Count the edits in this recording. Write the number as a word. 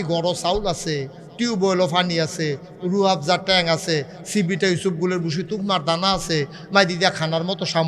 zero